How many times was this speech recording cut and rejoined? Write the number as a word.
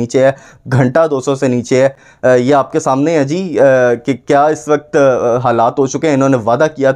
zero